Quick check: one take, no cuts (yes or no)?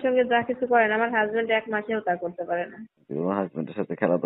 no